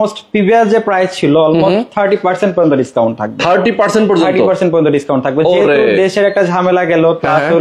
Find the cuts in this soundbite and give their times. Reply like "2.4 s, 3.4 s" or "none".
none